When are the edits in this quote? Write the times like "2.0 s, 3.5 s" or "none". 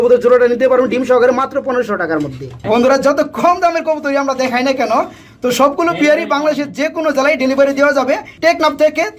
2.6 s, 8.3 s